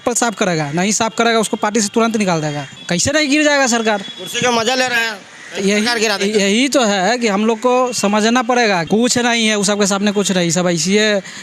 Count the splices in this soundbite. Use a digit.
2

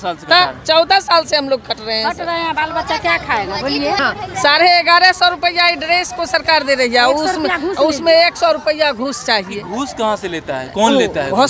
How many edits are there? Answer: 1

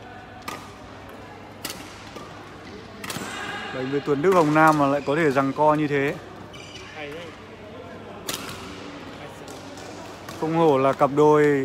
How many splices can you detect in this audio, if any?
0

